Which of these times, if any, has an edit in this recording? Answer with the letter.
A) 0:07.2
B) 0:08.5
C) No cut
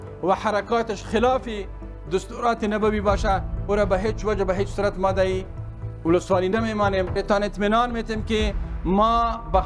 A